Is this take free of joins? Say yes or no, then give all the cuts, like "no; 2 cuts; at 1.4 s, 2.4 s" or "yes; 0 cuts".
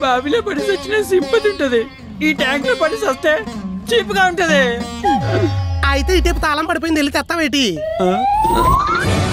yes; 0 cuts